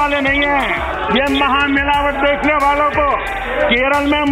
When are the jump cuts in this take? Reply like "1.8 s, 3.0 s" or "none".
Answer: 0.9 s, 3.4 s